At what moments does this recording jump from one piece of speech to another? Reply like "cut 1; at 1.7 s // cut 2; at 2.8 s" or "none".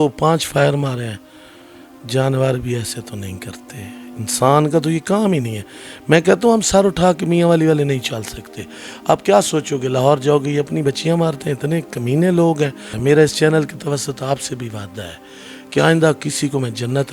cut 1; at 12.9 s